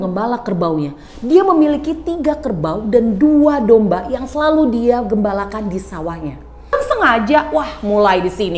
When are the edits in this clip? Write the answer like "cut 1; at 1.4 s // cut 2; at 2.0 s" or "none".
cut 1; at 6.7 s